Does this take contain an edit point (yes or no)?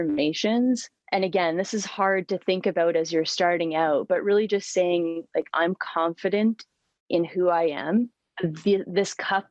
yes